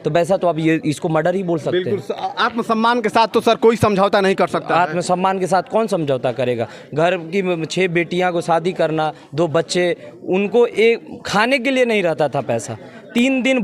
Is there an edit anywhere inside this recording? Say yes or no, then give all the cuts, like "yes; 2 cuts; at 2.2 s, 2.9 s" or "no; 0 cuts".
no; 0 cuts